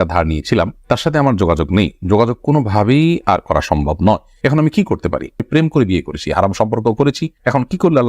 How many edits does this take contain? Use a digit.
1